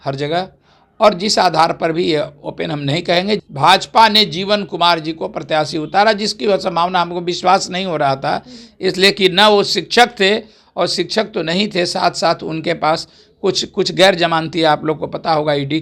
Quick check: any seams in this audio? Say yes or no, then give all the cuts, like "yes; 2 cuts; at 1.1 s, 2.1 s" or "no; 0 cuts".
yes; 1 cut; at 3.5 s